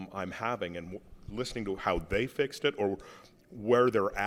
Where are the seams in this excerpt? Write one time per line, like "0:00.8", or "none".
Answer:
none